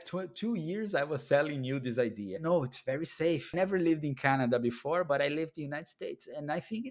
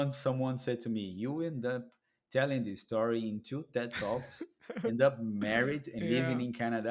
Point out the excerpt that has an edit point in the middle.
first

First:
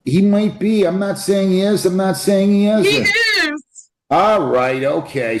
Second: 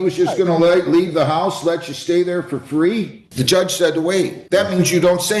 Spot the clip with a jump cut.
second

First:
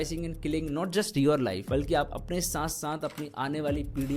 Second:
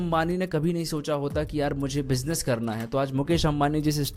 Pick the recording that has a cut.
first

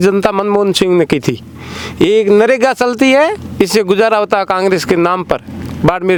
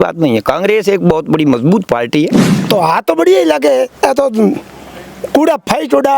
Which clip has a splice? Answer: second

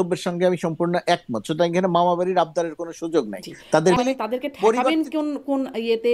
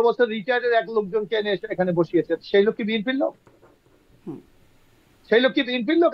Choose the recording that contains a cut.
first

